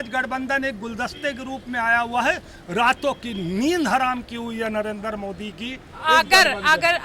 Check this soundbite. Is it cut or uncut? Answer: uncut